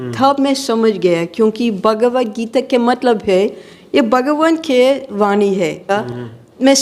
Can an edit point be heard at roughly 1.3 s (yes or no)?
no